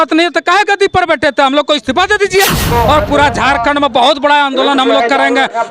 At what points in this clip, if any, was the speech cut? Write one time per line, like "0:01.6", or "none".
0:02.7